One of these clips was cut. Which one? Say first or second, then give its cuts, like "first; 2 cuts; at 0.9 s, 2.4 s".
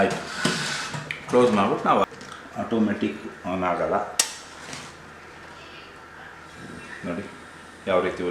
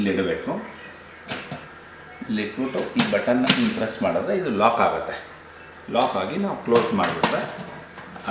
first; 1 cut; at 2.0 s